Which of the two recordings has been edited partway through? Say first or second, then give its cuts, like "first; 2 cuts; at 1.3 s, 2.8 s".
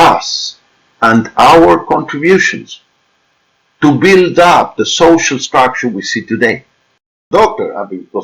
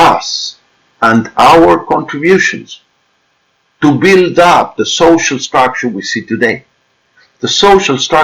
first; 1 cut; at 7.2 s